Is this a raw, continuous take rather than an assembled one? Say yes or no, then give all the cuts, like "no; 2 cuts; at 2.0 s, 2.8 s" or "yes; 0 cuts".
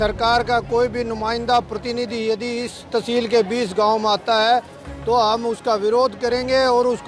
yes; 0 cuts